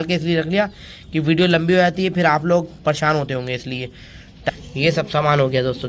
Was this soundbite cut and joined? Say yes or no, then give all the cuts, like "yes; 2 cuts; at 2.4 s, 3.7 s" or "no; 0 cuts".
yes; 1 cut; at 4.5 s